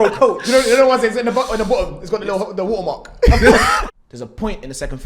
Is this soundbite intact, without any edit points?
no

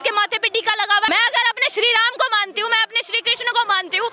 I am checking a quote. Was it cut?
yes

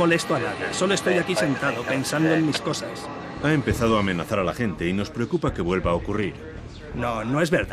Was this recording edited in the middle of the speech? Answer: no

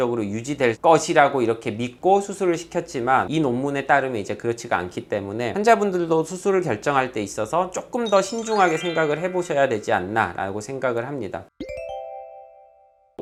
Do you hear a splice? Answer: no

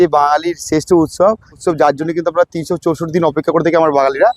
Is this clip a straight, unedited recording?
no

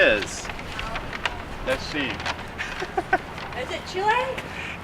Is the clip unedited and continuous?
no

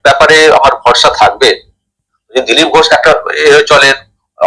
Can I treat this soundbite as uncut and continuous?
no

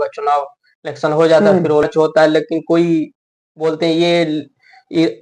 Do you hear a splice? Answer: yes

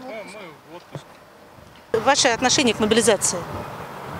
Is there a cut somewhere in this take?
yes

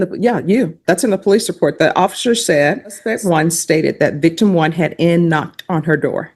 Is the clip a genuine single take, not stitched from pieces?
no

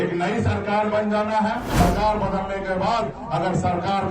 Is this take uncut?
no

